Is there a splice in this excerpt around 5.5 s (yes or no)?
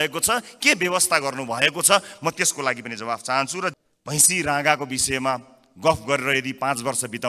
no